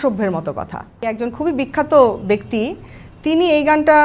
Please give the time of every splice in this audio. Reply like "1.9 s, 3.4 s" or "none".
1.1 s